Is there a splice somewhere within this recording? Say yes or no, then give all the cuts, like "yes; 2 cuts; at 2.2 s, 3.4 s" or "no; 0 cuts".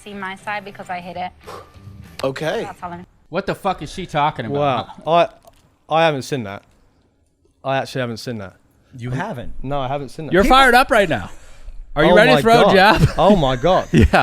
yes; 1 cut; at 3.1 s